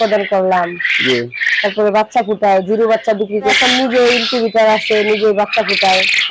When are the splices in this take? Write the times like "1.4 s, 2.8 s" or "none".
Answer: 3.5 s